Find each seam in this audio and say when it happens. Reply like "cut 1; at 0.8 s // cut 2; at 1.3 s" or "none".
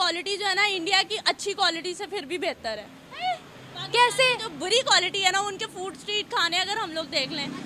none